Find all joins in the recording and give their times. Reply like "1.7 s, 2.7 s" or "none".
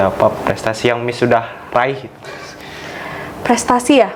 none